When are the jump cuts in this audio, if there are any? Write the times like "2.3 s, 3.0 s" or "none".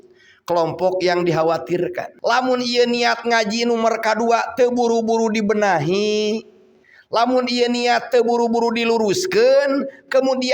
2.1 s